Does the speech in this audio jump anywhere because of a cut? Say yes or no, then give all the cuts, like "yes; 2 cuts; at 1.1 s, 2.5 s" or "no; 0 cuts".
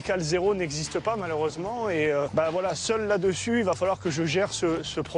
yes; 1 cut; at 2.3 s